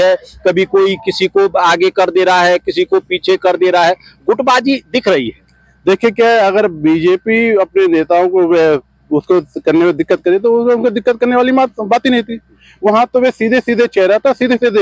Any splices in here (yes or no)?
no